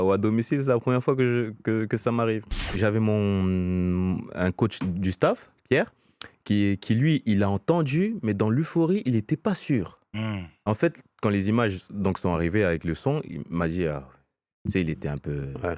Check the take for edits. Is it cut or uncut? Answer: cut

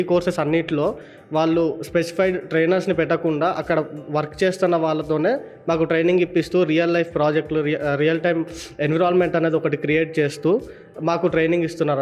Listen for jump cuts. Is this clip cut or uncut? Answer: uncut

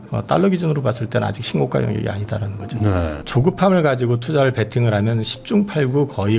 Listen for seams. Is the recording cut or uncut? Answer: cut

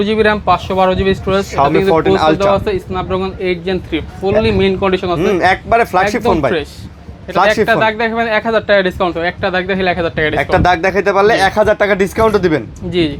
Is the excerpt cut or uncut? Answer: uncut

